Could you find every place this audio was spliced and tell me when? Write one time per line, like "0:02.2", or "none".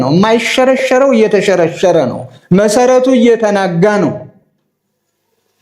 none